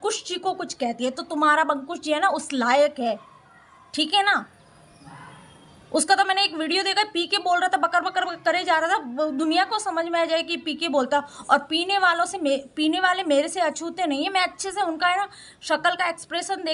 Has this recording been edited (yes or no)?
no